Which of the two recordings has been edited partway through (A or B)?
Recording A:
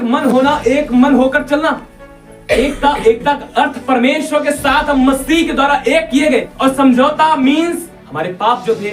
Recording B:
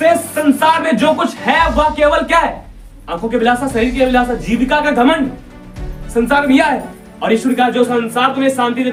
A